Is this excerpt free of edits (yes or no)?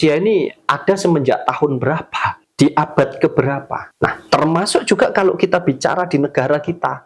no